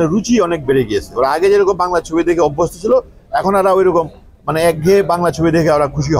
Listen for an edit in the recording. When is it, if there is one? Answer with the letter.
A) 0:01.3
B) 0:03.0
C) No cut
C